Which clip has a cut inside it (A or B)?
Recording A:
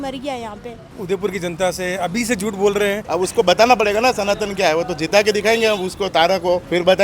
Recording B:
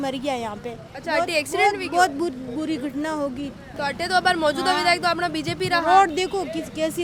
A